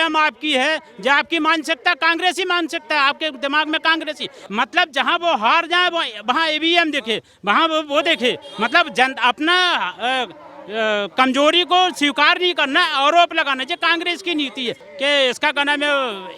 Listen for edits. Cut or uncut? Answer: cut